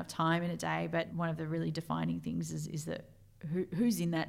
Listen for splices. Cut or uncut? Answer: cut